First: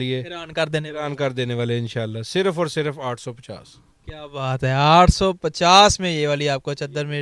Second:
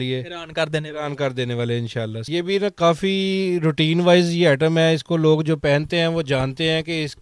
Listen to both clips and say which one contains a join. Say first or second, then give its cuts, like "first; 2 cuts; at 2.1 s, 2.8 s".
second; 1 cut; at 2.3 s